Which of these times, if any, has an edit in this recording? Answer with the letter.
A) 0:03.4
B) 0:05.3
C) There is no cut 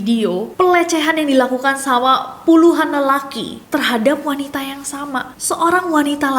B